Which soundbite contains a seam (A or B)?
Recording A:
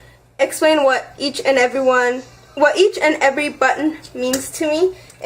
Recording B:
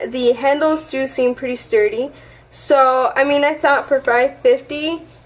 A